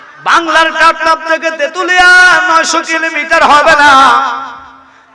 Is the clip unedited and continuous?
yes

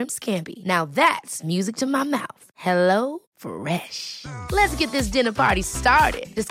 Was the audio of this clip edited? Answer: no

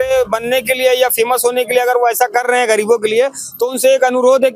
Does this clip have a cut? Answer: no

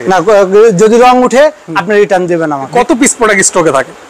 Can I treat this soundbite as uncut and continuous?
no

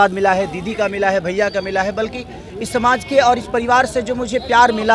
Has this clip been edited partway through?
no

